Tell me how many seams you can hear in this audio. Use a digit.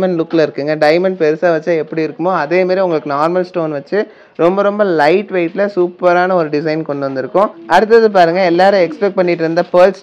1